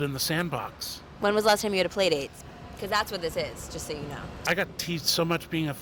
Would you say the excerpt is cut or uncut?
cut